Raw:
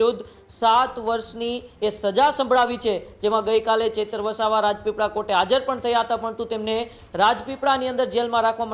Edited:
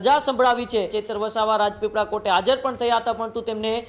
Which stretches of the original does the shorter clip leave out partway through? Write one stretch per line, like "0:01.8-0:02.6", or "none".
0:03.1-0:04.0